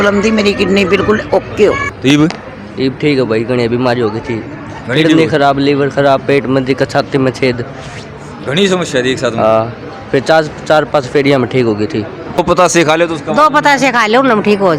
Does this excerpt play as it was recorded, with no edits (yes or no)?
no